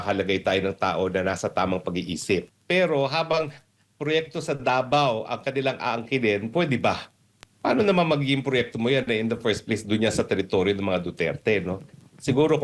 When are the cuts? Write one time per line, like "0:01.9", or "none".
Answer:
0:02.5